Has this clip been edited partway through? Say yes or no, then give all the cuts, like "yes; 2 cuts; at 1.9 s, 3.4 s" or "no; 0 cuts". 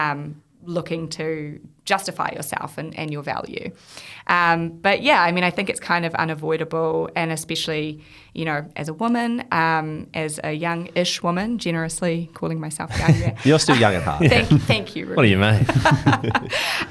no; 0 cuts